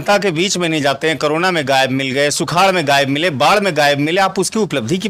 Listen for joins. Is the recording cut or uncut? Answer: uncut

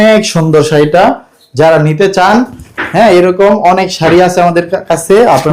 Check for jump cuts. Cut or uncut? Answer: uncut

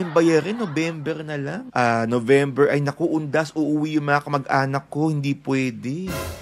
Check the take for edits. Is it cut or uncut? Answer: cut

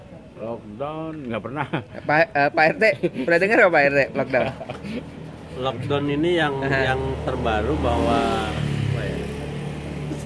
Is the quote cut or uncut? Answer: uncut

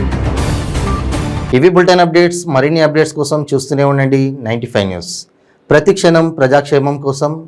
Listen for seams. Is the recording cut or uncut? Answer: uncut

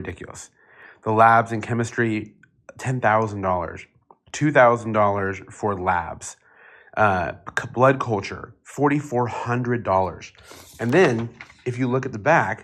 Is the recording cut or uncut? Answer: uncut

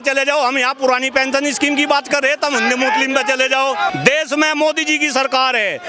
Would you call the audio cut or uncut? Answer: cut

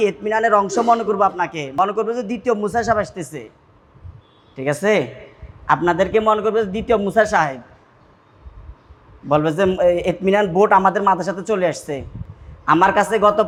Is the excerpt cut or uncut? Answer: uncut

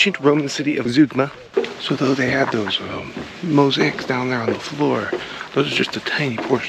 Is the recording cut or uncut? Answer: cut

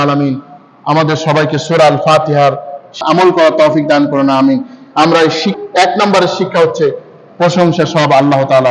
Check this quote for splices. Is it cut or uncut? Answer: cut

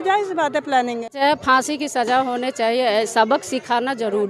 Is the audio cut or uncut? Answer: cut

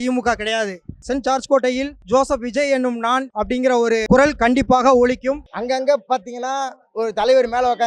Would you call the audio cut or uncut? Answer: cut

